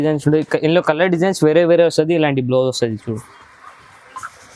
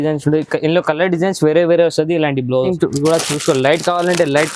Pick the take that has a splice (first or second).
second